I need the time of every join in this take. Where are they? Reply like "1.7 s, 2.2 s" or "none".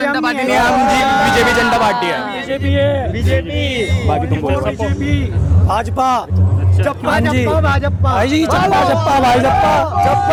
none